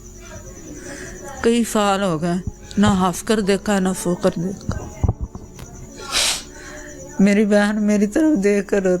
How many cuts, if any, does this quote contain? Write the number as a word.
one